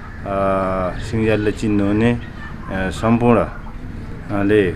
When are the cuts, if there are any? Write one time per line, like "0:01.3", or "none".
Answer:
none